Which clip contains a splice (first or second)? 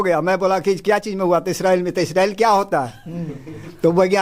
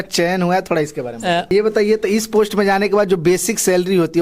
second